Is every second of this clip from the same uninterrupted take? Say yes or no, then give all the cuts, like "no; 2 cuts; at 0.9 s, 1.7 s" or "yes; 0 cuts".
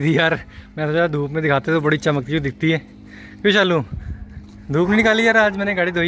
yes; 0 cuts